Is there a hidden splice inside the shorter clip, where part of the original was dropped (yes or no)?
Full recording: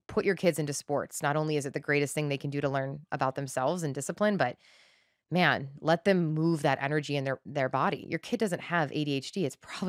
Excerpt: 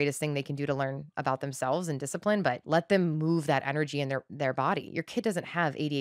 yes